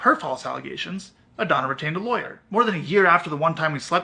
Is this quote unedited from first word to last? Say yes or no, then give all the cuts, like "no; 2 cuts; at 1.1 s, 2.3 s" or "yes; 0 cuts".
no; 1 cut; at 2.4 s